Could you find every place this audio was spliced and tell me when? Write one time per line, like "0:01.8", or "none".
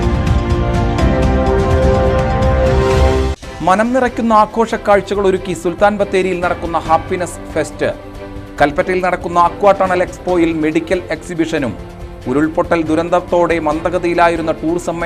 0:03.3